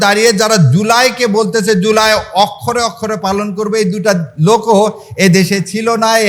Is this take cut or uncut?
uncut